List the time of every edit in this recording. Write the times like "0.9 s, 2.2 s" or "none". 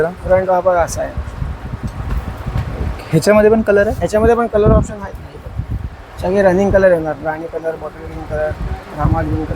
none